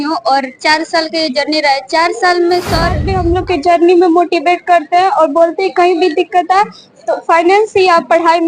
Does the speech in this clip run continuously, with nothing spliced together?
no; 1 cut; at 3.1 s

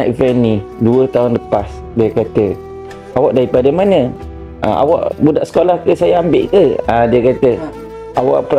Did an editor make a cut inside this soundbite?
no; 0 cuts

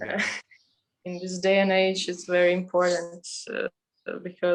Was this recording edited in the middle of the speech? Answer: no; 0 cuts

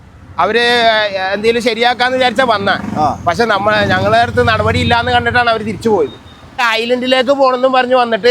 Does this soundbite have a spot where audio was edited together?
yes; 1 cut; at 6.6 s

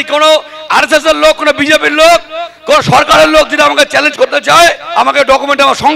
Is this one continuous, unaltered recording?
yes; 0 cuts

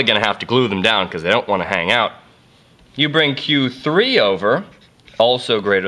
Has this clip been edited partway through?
yes; 1 cut; at 1.2 s

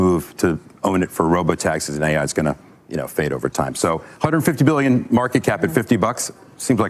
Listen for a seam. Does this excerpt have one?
no; 0 cuts

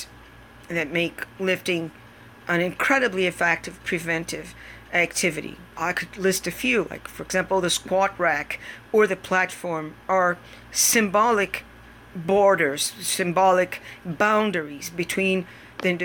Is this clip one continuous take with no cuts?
no; 2 cuts; at 1.2 s, 5.8 s

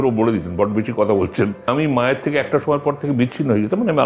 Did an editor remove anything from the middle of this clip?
yes; 1 cut; at 1.6 s

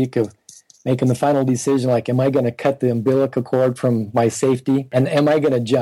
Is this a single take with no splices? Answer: no; 1 cut; at 4.9 s

